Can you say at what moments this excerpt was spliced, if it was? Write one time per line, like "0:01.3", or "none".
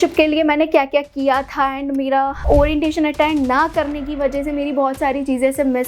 0:02.4